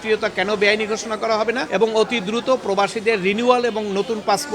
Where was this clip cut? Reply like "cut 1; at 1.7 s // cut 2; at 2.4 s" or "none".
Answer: cut 1; at 1.6 s